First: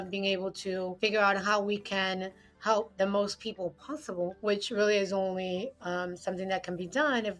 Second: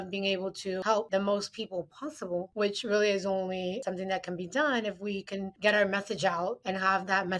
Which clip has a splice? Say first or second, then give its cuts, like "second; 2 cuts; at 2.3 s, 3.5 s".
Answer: second; 3 cuts; at 1.0 s, 3.8 s, 6.6 s